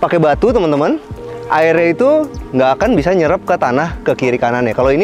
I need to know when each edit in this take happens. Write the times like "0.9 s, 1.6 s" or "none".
none